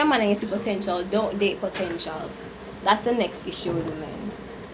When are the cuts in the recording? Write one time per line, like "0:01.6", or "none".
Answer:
none